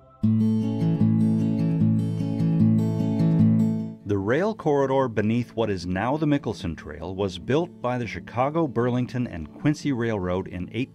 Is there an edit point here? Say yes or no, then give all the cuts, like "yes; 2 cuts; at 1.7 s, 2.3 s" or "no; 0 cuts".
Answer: yes; 1 cut; at 5.8 s